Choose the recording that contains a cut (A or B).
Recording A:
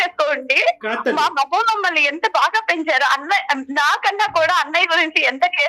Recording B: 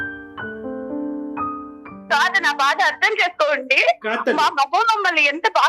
B